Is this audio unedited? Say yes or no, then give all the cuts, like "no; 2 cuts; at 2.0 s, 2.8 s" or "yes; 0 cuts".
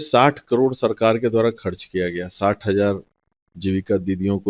yes; 0 cuts